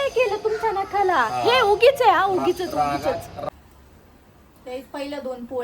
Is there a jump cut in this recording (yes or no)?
yes